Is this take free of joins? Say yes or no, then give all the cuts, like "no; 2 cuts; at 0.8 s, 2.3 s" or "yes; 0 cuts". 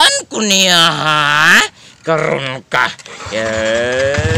yes; 0 cuts